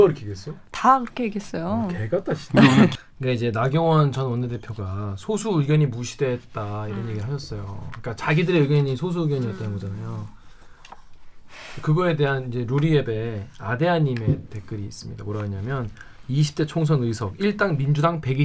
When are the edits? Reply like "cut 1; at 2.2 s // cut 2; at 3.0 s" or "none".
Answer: cut 1; at 2.9 s